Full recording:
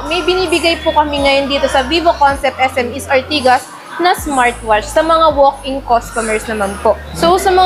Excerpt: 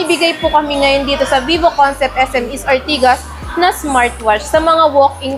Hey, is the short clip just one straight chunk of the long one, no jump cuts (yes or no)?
yes